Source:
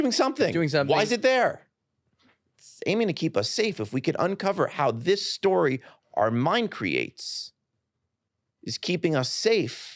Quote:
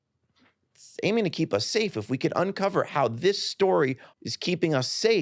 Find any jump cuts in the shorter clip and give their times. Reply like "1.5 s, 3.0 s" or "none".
4.1 s